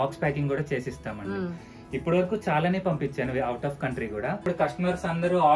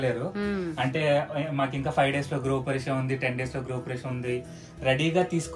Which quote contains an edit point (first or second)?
first